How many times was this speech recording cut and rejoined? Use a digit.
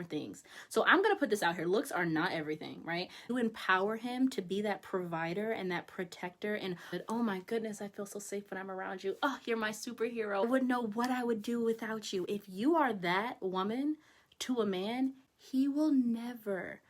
3